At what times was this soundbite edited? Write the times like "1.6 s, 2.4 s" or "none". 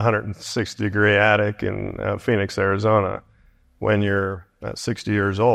none